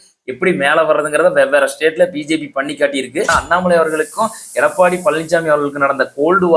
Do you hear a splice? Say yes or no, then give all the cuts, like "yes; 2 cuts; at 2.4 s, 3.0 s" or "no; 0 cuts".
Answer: yes; 1 cut; at 3.4 s